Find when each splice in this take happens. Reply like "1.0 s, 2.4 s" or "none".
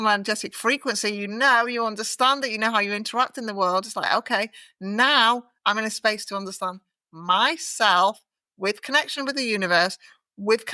none